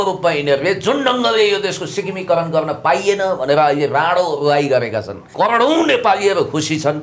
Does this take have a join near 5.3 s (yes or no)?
yes